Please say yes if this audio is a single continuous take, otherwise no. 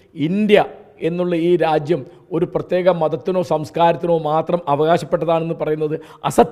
yes